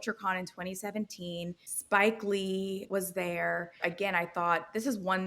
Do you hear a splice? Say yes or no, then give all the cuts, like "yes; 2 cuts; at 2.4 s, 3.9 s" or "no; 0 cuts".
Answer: yes; 3 cuts; at 1.7 s, 2.8 s, 3.8 s